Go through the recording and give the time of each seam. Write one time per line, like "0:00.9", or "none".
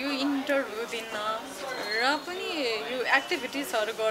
none